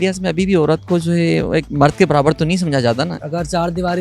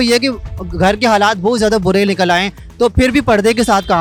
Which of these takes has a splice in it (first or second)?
first